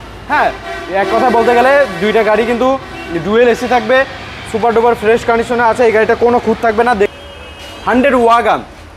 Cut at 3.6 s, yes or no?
no